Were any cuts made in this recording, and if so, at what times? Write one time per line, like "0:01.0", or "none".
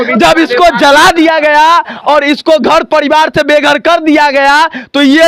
none